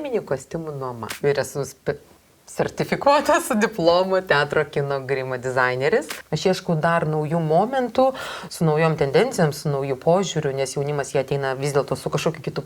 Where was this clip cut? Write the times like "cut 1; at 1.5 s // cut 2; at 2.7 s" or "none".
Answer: cut 1; at 1.1 s // cut 2; at 6.2 s